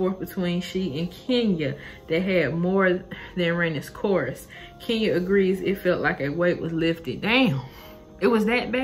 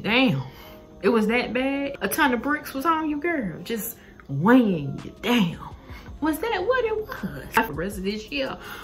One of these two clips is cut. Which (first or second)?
second